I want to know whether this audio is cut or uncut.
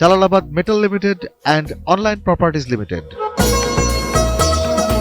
cut